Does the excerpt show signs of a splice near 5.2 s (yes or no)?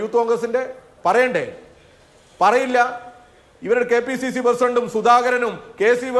no